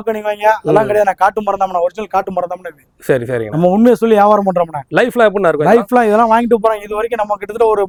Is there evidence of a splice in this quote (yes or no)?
no